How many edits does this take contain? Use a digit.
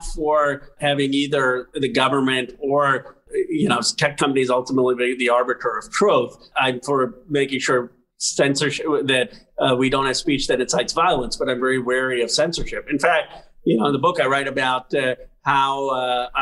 3